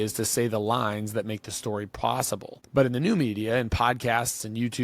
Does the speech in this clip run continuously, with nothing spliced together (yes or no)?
no